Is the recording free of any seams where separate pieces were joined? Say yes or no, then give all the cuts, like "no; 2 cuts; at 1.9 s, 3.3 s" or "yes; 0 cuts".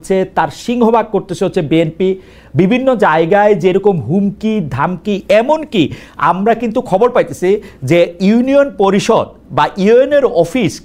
yes; 0 cuts